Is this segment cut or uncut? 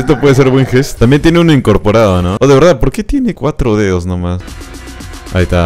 cut